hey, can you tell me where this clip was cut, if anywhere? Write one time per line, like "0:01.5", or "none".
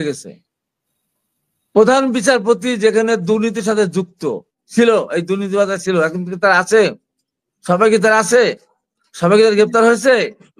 0:04.5